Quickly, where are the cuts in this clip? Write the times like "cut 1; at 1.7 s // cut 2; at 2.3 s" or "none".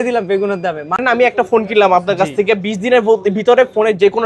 cut 1; at 1.0 s

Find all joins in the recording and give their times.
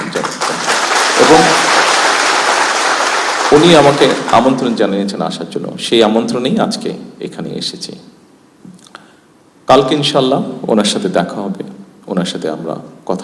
none

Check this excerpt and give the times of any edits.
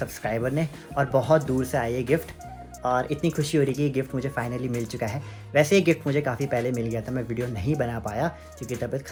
none

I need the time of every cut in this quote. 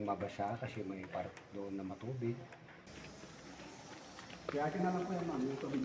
cut 1; at 2.9 s

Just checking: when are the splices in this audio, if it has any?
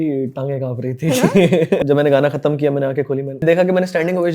cut 1; at 1.8 s // cut 2; at 3.4 s

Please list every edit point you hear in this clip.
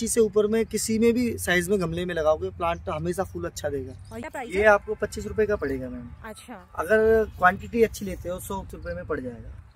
cut 1; at 4.1 s // cut 2; at 8.7 s

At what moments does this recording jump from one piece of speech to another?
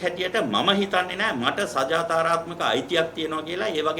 none

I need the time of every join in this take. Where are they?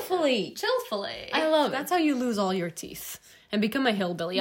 cut 1; at 1.8 s

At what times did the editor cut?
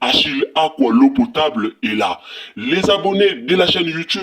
none

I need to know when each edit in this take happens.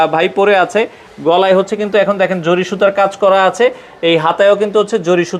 none

